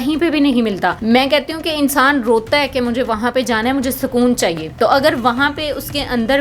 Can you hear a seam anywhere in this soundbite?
yes; 2 cuts; at 1.0 s, 4.7 s

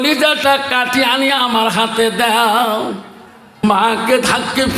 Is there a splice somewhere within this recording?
yes; 1 cut; at 3.6 s

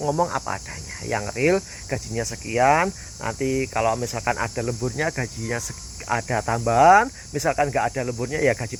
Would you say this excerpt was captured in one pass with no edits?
yes; 0 cuts

